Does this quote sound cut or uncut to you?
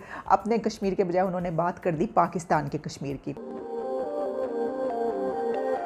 uncut